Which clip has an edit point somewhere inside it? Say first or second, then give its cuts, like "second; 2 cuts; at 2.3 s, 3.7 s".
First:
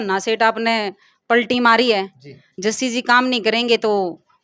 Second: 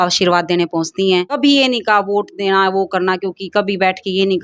second; 1 cut; at 1.3 s